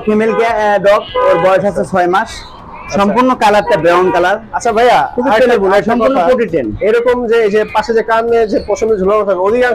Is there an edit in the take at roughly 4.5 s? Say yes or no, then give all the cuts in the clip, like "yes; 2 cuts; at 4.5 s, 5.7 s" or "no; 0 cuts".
no; 0 cuts